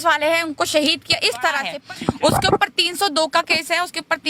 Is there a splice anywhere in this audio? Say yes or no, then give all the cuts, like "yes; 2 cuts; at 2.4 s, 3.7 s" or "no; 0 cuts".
yes; 1 cut; at 1.7 s